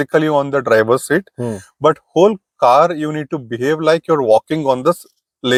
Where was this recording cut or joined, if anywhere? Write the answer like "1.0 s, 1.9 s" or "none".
none